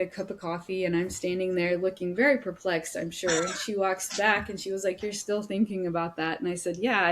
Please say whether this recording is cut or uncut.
uncut